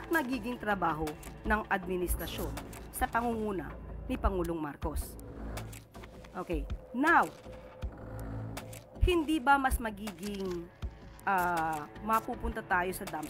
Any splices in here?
yes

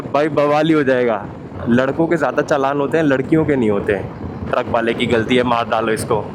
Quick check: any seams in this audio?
yes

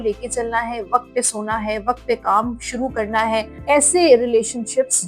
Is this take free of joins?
no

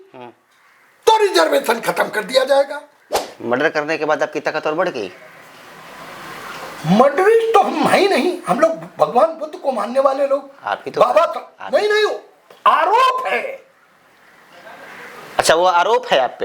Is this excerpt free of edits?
no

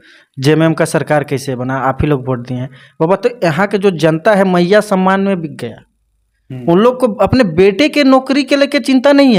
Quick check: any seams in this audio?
no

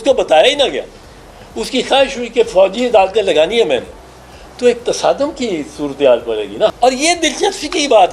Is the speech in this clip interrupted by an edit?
yes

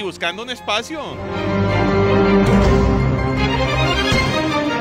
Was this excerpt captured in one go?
no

